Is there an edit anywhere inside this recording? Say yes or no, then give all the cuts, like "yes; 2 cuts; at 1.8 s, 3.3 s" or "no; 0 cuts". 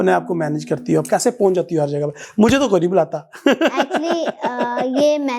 no; 0 cuts